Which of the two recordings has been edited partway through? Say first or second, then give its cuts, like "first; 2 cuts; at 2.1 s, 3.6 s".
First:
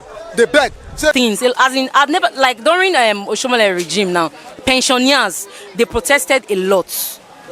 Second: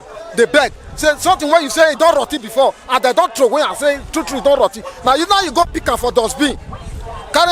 first; 1 cut; at 1.2 s